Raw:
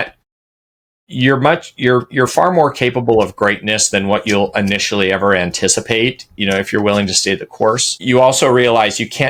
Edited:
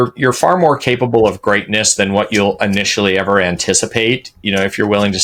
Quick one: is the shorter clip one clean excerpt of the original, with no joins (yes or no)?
yes